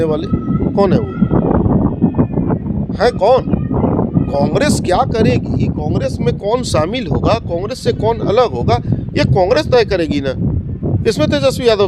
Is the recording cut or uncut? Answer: uncut